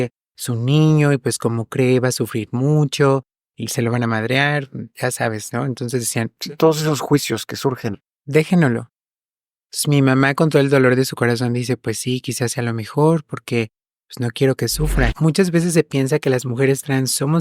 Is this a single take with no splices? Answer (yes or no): no